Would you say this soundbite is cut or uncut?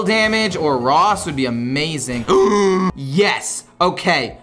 cut